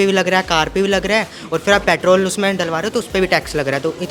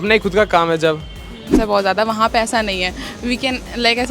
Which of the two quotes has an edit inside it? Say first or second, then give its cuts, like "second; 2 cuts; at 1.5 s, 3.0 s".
second; 1 cut; at 1.5 s